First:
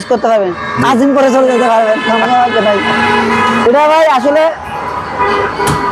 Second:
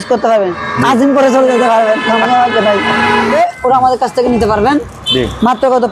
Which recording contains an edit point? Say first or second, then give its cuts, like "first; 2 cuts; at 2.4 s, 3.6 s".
second; 1 cut; at 3.3 s